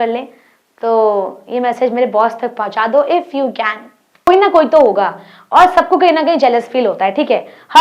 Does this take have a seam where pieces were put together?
yes; 1 cut; at 4.3 s

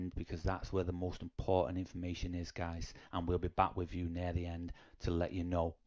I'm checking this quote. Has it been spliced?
no; 0 cuts

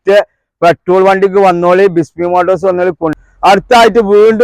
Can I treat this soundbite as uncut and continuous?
no; 1 cut; at 3.1 s

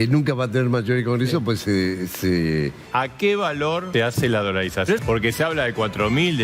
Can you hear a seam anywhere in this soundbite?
yes; 3 cuts; at 2.8 s, 3.9 s, 5.0 s

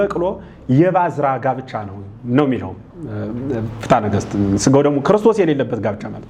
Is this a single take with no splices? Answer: yes; 0 cuts

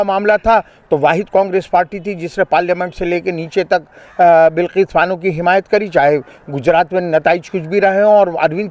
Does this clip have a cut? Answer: no; 0 cuts

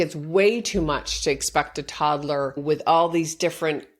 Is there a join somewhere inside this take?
yes; 1 cut; at 2.6 s

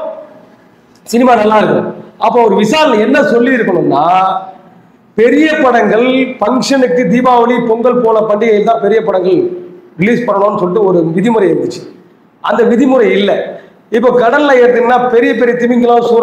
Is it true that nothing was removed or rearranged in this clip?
yes; 0 cuts

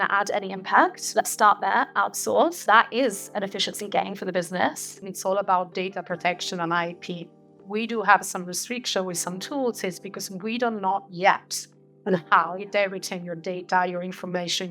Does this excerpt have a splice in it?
yes; 3 cuts; at 1.0 s, 2.6 s, 5.1 s

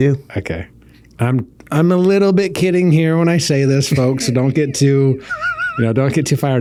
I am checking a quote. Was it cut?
no; 0 cuts

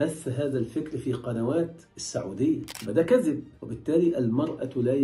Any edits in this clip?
yes; 1 cut; at 2.7 s

